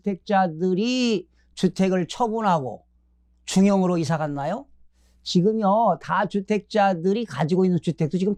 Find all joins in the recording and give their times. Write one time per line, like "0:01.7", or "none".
none